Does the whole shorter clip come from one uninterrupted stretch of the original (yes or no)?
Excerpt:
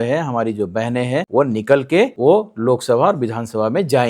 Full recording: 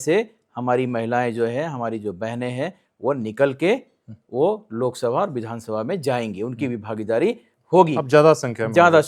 no